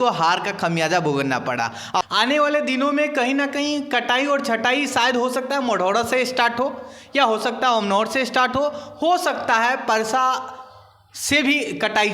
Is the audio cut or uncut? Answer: cut